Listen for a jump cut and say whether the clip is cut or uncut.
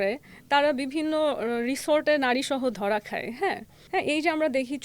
cut